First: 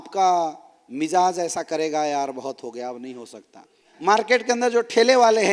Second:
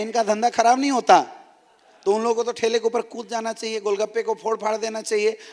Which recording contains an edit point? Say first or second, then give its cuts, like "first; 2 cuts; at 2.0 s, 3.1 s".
first; 1 cut; at 3.9 s